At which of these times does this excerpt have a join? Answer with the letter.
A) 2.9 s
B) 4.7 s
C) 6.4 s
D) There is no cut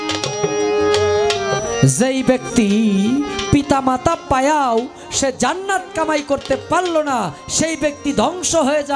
D